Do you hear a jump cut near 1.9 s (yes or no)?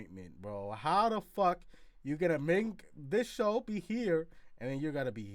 no